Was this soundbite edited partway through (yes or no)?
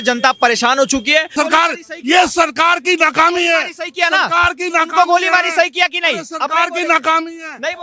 yes